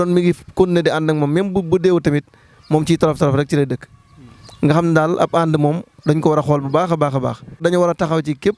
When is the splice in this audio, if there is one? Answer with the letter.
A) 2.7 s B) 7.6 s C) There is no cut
B